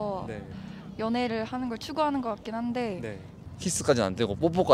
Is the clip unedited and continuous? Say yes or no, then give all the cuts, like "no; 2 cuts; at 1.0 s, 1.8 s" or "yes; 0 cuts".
no; 1 cut; at 3.4 s